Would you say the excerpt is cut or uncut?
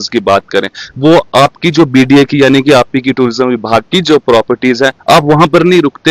uncut